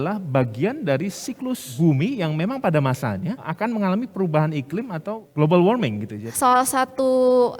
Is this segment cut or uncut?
cut